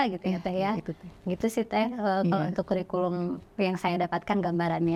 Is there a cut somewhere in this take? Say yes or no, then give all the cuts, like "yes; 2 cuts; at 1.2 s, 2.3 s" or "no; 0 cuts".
no; 0 cuts